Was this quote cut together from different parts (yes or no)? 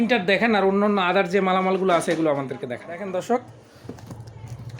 yes